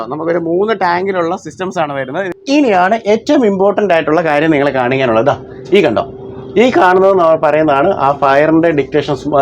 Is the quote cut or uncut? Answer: cut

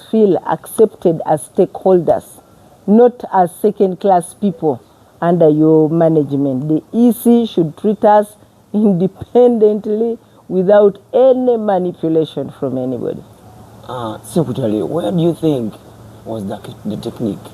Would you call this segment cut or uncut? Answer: uncut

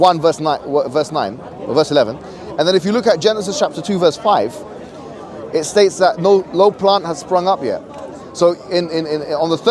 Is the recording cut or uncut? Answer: uncut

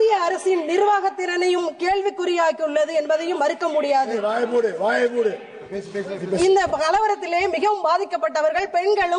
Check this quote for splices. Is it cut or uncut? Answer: uncut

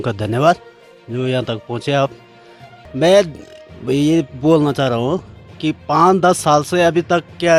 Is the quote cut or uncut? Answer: uncut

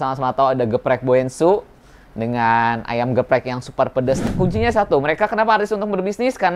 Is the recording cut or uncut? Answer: cut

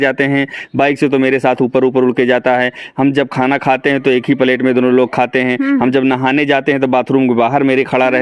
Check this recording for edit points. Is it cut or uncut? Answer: uncut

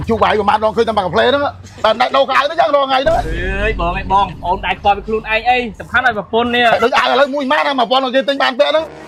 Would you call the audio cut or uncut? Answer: uncut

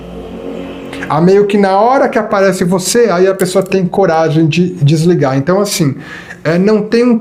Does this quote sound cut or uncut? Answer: uncut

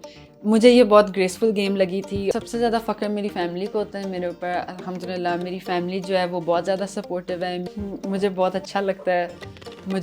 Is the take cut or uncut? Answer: cut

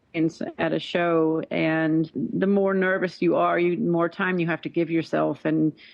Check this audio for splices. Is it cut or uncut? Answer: cut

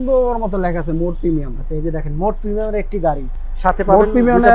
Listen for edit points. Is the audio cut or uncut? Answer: uncut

